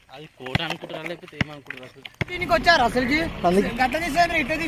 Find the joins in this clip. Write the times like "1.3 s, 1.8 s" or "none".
2.4 s